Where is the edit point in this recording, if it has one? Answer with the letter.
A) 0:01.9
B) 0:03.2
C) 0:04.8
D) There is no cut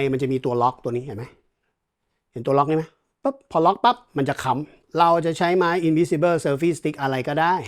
C